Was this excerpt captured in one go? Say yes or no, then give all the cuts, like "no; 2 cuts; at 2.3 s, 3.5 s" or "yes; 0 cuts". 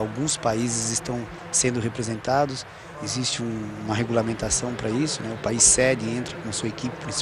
no; 1 cut; at 4.9 s